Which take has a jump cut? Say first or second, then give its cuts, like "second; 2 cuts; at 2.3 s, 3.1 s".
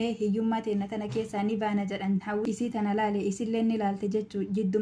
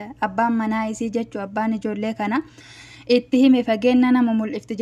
first; 1 cut; at 2.3 s